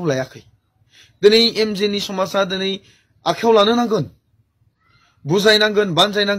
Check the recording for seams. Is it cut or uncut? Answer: uncut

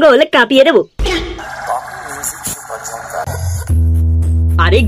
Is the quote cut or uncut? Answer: cut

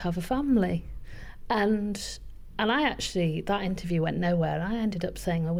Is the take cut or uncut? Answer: uncut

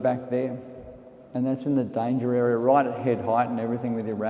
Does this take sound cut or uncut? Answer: uncut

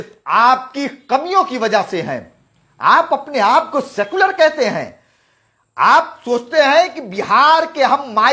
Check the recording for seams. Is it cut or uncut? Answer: uncut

